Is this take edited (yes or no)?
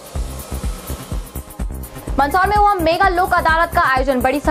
no